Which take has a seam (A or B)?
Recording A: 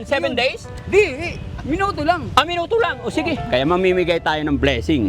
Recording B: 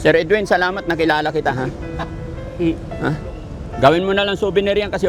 A